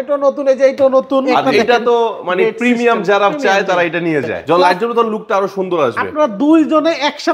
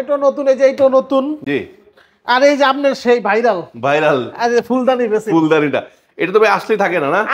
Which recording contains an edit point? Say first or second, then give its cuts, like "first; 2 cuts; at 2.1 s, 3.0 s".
first; 2 cuts; at 1.5 s, 4.4 s